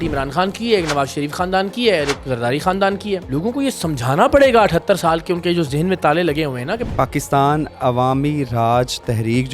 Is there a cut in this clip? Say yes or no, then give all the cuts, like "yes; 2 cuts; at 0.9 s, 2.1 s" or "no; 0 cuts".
yes; 2 cuts; at 3.2 s, 6.9 s